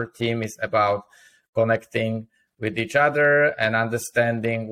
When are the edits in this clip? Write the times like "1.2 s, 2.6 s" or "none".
none